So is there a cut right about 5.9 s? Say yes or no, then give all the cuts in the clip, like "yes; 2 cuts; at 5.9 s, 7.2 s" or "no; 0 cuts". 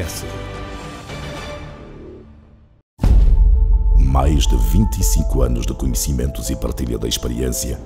no; 1 cut; at 3.0 s